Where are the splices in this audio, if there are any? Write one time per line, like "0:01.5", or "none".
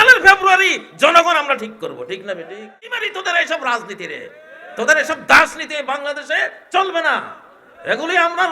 0:03.0